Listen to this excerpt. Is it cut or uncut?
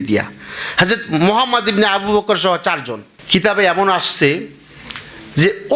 uncut